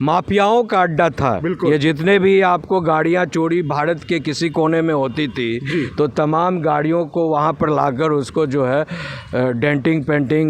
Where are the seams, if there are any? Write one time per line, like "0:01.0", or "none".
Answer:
none